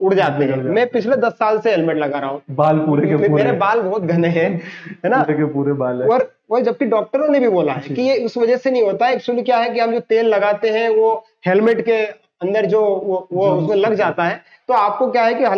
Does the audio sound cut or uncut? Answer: uncut